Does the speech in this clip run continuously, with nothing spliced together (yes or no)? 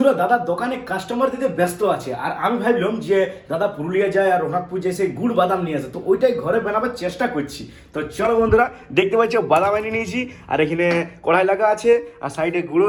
yes